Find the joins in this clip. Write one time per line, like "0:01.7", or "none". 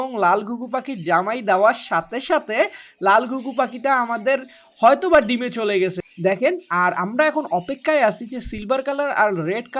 0:06.1